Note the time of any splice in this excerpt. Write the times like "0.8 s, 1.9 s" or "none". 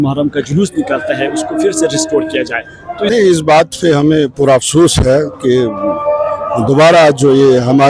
3.1 s